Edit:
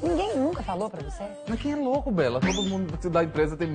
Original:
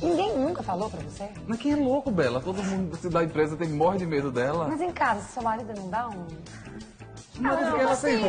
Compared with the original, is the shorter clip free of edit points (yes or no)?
yes